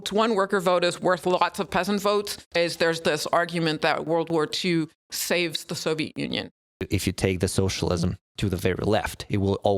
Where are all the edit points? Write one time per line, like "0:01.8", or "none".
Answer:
0:02.6
0:06.9